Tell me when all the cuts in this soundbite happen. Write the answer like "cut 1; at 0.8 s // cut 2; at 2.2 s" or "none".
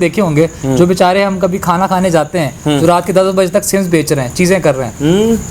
none